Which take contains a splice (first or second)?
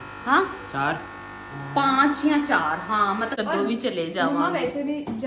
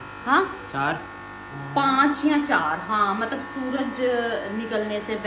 first